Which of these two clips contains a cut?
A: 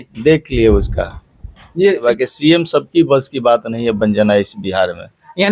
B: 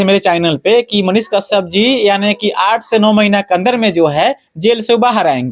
A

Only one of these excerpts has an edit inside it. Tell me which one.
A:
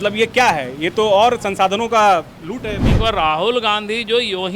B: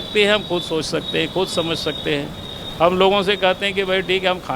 A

